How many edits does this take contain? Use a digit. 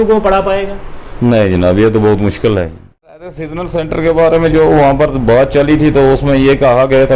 1